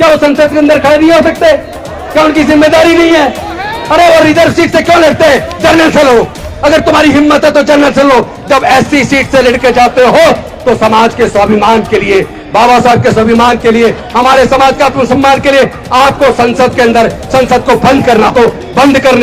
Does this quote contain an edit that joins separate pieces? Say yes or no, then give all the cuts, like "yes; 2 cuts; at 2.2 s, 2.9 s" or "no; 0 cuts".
yes; 1 cut; at 18.3 s